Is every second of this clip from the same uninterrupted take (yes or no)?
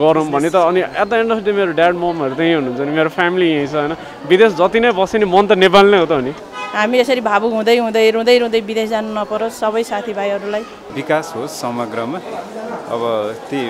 no